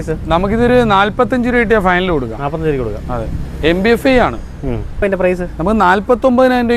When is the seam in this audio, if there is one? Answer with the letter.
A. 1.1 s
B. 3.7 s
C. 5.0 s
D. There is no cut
C